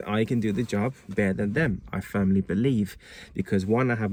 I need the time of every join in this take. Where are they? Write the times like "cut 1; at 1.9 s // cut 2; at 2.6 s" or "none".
none